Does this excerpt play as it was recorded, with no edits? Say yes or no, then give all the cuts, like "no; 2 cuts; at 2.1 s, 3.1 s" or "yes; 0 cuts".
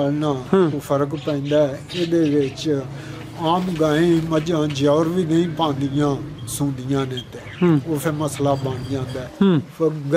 no; 1 cut; at 9.2 s